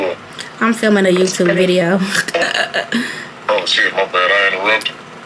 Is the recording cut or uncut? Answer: uncut